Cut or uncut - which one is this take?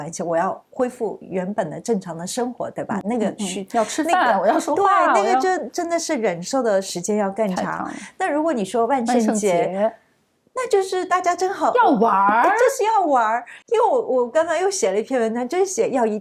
uncut